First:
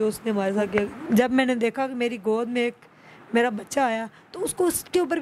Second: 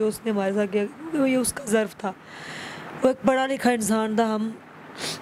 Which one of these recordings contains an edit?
first; 1 cut; at 1.0 s

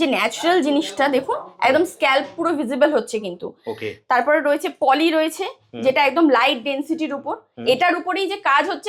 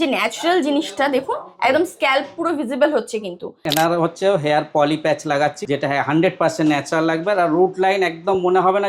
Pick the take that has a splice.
second; 2 cuts; at 3.6 s, 5.6 s

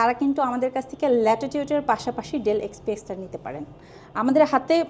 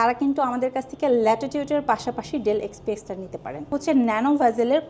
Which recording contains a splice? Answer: second; 1 cut; at 3.8 s

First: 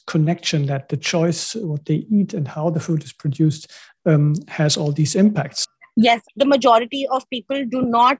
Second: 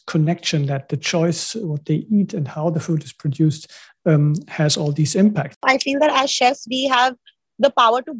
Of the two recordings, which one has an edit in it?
second; 1 cut; at 5.7 s

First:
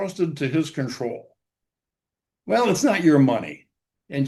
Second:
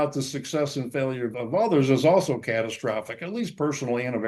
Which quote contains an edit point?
second; 1 cut; at 1.3 s

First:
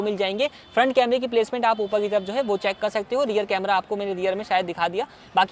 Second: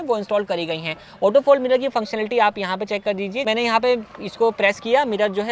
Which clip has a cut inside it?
second; 1 cut; at 3.4 s

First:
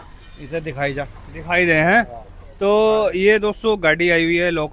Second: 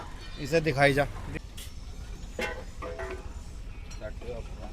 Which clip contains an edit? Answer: second; 1 cut; at 1.3 s

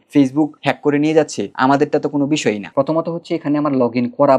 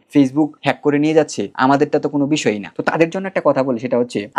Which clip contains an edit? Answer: first; 1 cut; at 2.7 s

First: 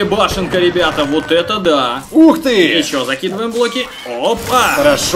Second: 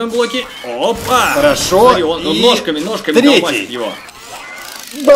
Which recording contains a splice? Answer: first; 1 cut; at 2.0 s

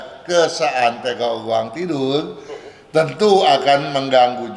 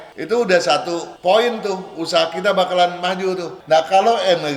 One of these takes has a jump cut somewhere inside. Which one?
second; 1 cut; at 3.5 s

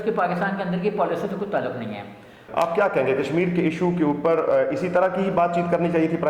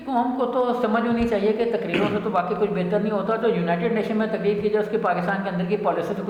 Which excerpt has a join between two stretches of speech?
first; 1 cut; at 2.4 s

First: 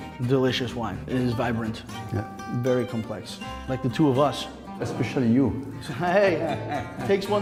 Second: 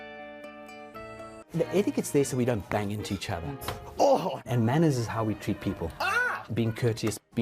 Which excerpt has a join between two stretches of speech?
second; 1 cut; at 1.4 s

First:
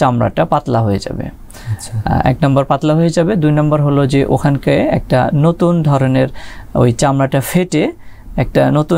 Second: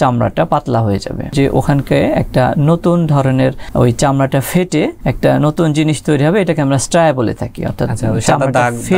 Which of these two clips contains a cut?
second; 3 cuts; at 1.3 s, 3.6 s, 5.0 s

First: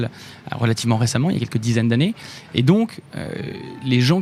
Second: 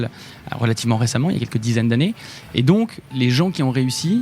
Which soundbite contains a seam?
second; 1 cut; at 3.0 s

